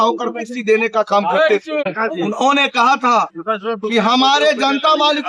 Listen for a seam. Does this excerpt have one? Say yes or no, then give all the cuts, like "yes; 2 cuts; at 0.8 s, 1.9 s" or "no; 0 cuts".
yes; 1 cut; at 1.8 s